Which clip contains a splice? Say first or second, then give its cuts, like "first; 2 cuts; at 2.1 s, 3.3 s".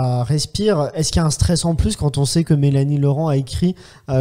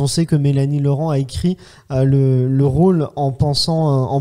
first; 1 cut; at 0.9 s